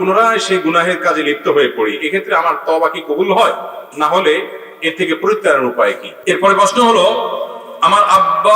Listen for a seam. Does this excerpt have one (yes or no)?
yes